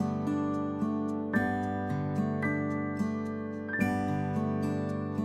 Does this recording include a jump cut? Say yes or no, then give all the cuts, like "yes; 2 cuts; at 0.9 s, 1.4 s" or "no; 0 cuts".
no; 0 cuts